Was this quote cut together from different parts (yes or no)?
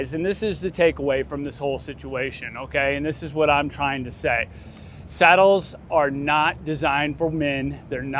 no